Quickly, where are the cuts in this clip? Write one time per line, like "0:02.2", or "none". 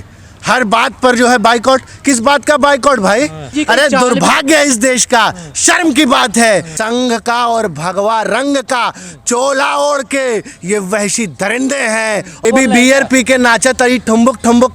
0:03.5
0:06.7
0:12.4